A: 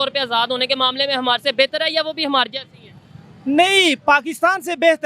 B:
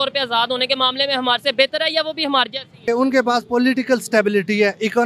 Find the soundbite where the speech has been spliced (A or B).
B